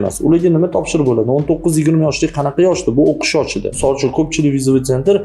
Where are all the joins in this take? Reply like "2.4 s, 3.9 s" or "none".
3.7 s

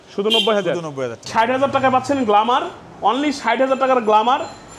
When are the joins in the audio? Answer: 1.2 s

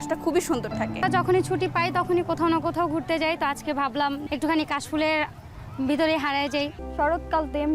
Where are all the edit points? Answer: 1.0 s, 4.2 s, 6.8 s

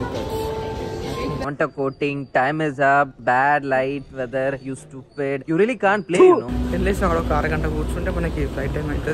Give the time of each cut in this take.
1.4 s, 6.5 s

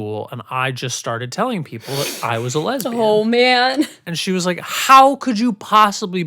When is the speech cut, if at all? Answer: 4.0 s

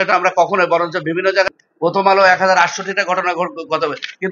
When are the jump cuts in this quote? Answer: 1.5 s

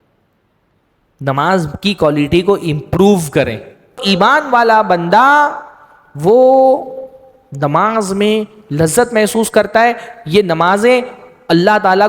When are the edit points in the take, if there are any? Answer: 4.0 s

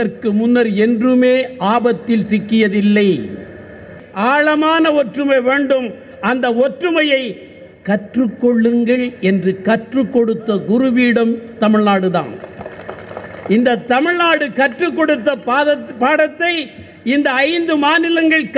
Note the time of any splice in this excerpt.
4.0 s

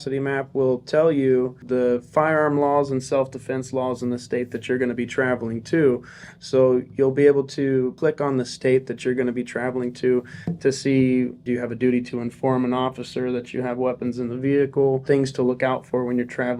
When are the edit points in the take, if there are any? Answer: 1.6 s, 8.0 s, 11.4 s, 15.0 s

